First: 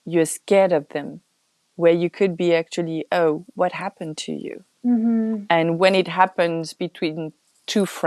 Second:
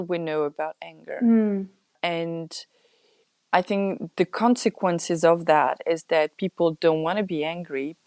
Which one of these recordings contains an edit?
second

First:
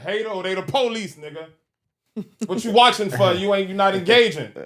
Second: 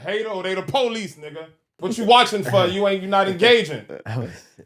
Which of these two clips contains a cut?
second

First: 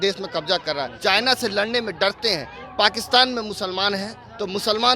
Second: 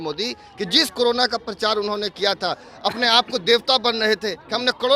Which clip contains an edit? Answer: first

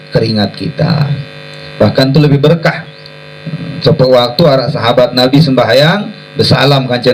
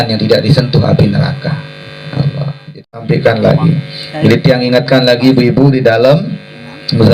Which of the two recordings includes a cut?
second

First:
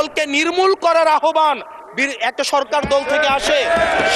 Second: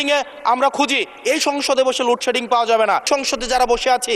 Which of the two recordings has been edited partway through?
second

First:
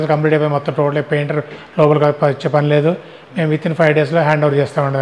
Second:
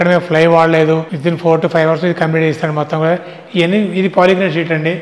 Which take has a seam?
second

